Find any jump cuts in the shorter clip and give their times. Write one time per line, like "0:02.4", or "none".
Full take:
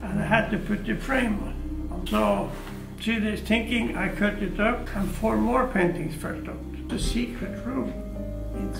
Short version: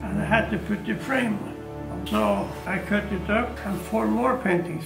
0:02.7